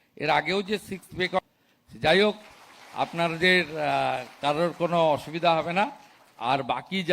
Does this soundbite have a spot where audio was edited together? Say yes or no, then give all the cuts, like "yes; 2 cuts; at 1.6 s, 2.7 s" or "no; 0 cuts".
yes; 1 cut; at 1.4 s